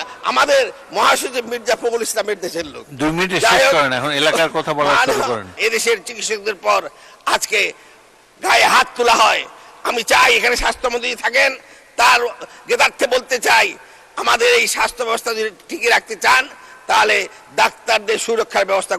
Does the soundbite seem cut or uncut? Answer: cut